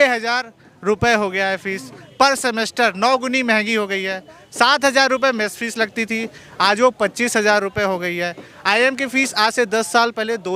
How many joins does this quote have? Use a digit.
0